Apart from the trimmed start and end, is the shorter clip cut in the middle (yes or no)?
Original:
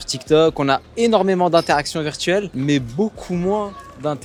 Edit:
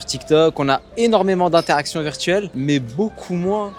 no